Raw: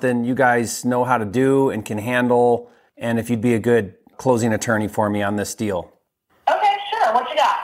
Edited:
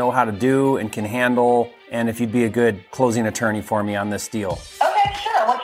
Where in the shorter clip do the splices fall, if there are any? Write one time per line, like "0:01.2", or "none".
0:01.8
0:02.9
0:04.6